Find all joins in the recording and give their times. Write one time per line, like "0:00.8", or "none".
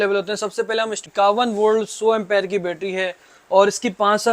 0:01.0